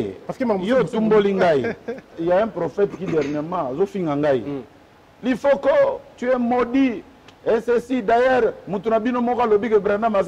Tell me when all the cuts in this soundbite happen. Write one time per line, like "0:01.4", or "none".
0:02.1